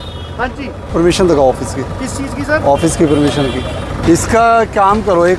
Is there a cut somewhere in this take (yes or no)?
yes